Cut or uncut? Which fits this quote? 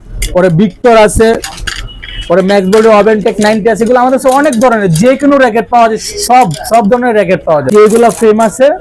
cut